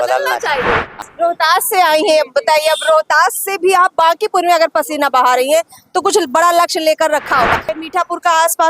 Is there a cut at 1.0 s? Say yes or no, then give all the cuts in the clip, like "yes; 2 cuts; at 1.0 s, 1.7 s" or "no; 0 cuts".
yes; 2 cuts; at 1.0 s, 7.8 s